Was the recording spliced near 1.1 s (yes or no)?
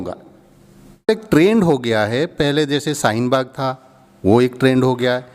yes